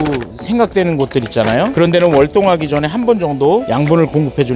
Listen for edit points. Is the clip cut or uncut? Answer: uncut